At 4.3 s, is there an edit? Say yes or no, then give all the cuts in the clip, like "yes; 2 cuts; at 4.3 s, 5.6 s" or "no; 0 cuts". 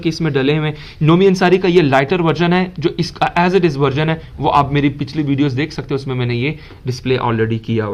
no; 0 cuts